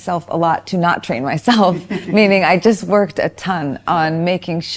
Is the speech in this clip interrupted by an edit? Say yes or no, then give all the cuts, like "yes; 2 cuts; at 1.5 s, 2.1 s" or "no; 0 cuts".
no; 0 cuts